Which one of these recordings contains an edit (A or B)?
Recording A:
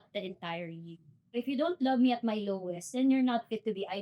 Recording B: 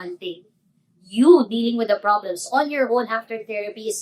A